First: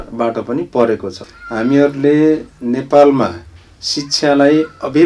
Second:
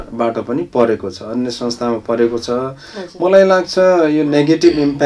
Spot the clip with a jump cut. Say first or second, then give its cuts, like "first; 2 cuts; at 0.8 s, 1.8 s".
first; 1 cut; at 1.2 s